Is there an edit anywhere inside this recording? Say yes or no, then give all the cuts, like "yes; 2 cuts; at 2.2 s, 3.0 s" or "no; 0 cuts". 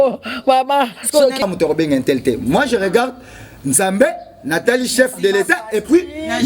yes; 1 cut; at 1.4 s